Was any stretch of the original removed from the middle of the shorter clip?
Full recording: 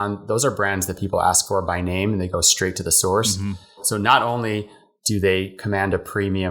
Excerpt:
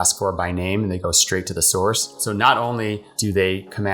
yes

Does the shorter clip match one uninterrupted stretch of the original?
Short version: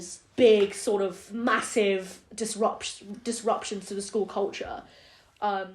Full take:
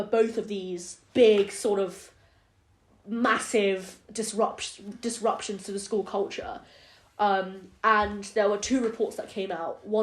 no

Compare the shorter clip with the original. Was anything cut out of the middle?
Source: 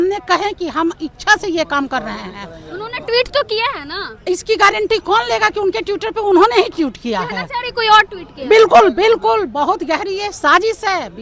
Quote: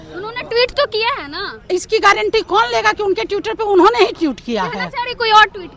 no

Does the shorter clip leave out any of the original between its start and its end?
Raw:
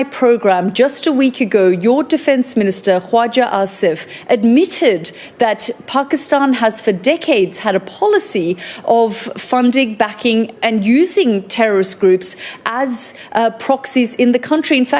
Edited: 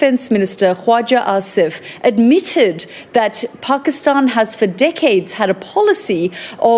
no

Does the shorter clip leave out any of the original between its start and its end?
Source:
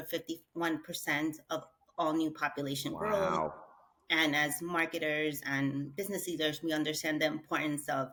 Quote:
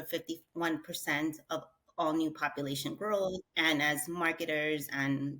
yes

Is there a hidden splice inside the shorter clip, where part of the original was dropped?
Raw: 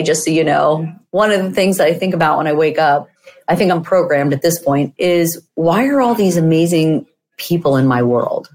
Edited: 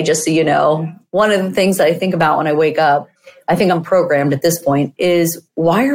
no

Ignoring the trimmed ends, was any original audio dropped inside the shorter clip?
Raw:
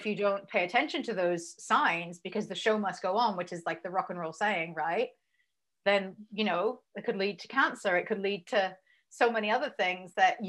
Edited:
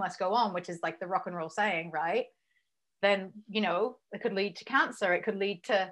no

